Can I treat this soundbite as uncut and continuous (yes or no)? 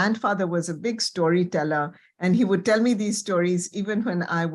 yes